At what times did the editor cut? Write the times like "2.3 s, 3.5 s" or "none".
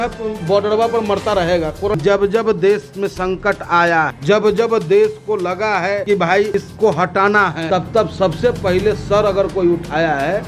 2.0 s, 4.2 s, 6.3 s, 7.6 s

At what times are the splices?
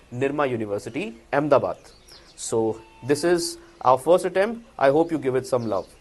none

